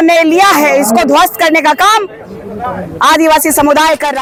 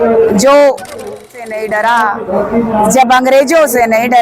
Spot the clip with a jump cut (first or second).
second